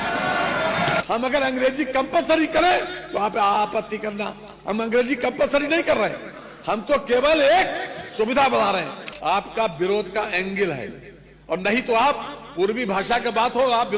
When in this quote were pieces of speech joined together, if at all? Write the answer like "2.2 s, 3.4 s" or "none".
1.0 s, 9.0 s

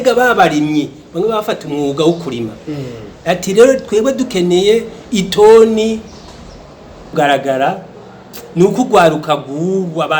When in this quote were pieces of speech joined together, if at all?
7.1 s

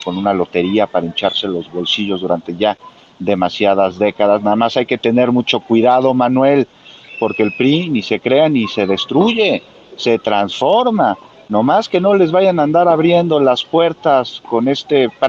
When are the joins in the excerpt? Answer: none

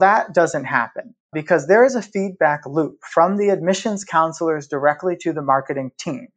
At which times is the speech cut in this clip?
1.4 s

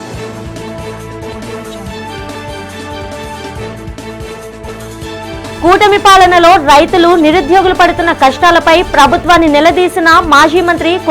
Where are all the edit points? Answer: none

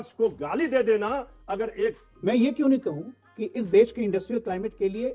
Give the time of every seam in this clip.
2.1 s

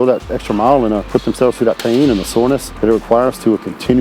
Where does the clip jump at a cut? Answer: 1.0 s, 2.7 s

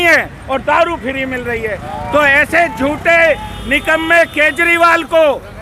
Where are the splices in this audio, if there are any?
none

